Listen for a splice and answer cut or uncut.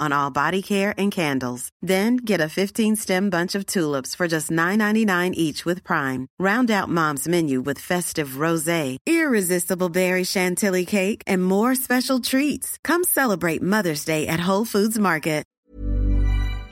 cut